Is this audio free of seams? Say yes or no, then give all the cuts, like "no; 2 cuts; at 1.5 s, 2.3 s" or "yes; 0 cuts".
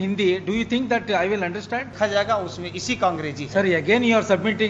no; 1 cut; at 1.9 s